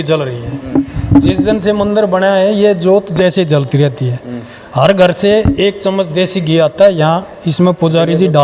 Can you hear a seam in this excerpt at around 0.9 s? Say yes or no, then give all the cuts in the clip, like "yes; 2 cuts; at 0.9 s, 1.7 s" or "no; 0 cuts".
no; 0 cuts